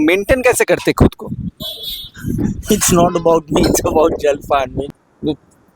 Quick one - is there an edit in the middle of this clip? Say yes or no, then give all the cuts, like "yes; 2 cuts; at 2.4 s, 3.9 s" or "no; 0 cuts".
yes; 1 cut; at 4.8 s